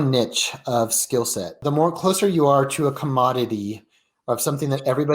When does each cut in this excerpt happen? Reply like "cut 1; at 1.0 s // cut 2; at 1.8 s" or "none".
cut 1; at 1.6 s